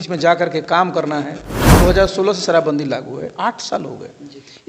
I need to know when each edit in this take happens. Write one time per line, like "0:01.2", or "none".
0:01.6